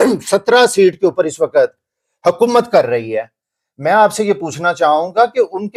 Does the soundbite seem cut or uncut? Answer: uncut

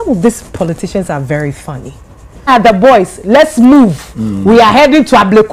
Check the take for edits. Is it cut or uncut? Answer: cut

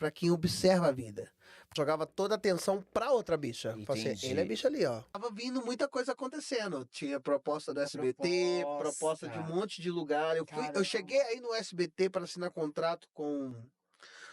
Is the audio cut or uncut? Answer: cut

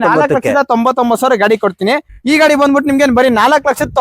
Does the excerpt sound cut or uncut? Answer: cut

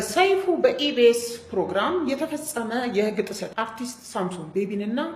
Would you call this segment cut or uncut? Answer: cut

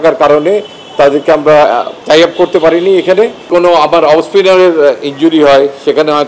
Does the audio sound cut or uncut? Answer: cut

